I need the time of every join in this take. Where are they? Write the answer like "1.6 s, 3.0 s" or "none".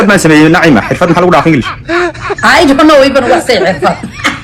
none